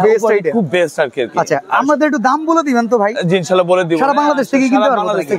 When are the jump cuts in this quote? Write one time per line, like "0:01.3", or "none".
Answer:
none